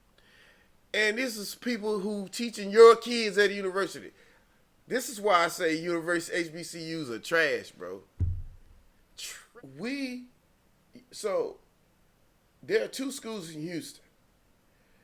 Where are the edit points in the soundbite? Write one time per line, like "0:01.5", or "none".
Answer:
0:09.4

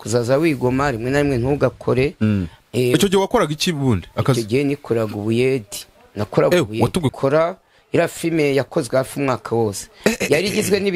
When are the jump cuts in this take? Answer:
0:07.1

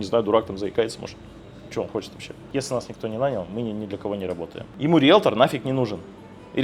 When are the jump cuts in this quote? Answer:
0:02.3
0:04.6

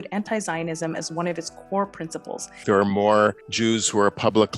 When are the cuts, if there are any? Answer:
0:02.6
0:03.5

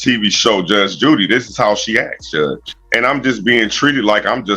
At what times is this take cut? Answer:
0:02.6

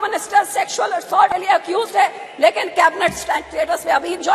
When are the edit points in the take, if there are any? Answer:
0:01.3

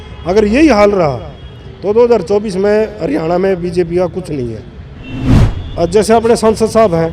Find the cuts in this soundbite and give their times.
0:05.4

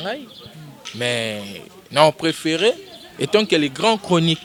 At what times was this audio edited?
none

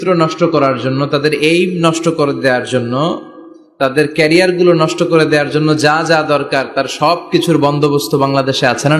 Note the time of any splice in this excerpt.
none

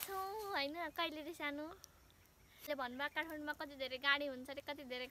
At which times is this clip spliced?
0:02.7

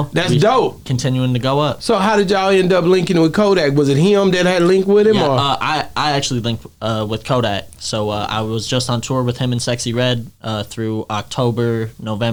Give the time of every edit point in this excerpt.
none

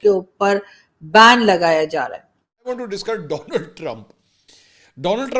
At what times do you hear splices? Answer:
0:02.7

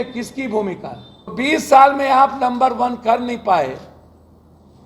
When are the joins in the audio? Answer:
0:01.3

